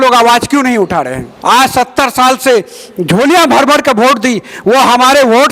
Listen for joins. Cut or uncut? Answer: cut